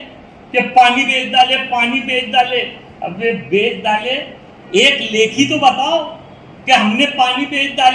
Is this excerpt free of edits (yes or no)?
yes